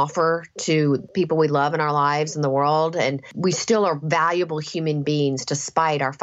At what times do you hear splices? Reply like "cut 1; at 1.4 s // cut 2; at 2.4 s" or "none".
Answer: cut 1; at 1.1 s // cut 2; at 3.3 s